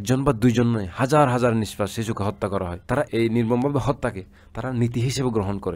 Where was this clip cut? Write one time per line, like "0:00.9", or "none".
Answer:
0:03.1